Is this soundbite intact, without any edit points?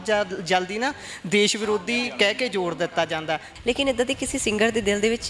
no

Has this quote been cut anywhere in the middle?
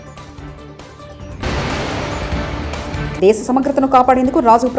yes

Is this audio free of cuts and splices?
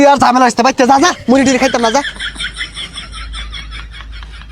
no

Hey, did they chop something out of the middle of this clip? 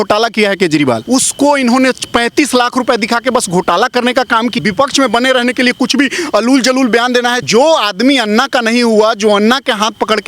yes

